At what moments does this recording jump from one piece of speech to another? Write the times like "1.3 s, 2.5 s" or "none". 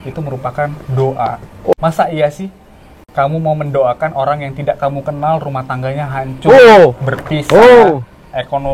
1.7 s